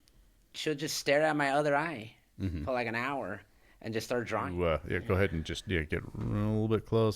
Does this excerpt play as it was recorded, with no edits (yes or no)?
no